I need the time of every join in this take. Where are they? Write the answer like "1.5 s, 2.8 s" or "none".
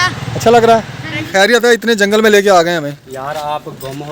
1.5 s